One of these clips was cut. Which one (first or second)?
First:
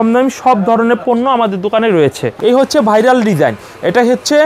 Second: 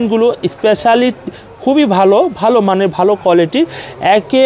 first